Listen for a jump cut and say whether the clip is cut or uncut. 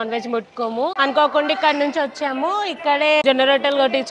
cut